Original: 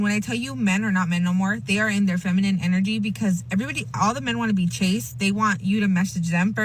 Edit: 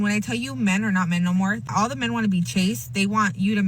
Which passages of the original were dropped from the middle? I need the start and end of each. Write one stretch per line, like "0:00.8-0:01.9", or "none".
0:01.6-0:03.9